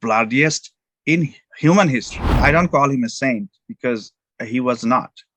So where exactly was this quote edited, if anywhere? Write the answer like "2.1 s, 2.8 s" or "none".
2.4 s